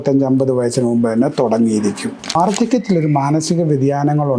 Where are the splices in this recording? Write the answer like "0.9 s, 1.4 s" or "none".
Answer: 2.4 s